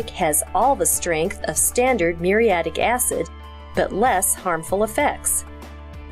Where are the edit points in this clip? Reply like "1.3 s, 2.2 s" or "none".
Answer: 5.2 s